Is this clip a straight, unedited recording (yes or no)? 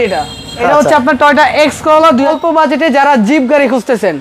no